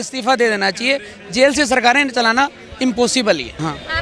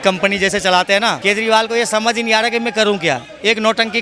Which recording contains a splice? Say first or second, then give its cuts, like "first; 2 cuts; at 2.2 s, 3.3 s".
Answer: second; 1 cut; at 1.2 s